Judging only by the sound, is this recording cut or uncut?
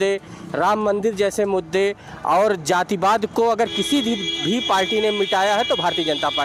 uncut